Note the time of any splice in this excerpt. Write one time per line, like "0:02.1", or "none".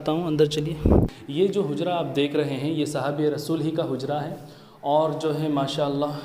0:01.2